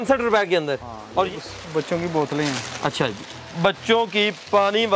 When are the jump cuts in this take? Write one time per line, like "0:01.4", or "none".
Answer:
0:01.3